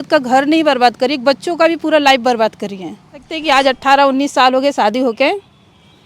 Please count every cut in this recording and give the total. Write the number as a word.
one